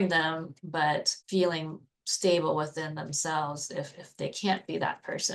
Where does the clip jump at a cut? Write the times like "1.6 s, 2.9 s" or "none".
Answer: 1.2 s

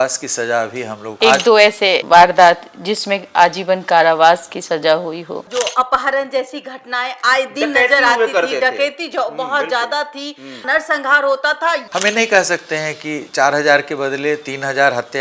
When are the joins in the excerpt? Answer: 1.1 s, 5.4 s, 11.9 s

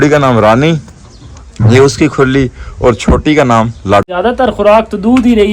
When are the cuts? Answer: 4.0 s

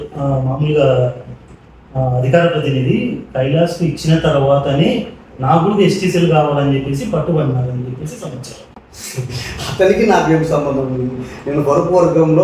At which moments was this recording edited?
none

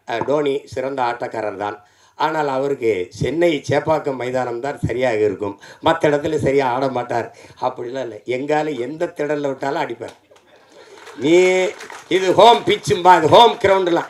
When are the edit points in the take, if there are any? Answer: none

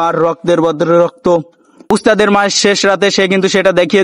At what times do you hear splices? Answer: 1.9 s

